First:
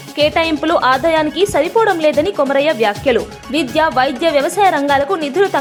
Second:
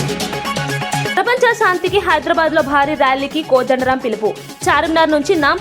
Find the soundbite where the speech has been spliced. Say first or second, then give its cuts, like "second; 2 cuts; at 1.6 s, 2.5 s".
second; 1 cut; at 1.1 s